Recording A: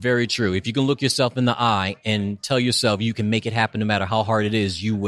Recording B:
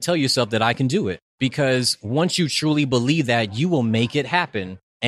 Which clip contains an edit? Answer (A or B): B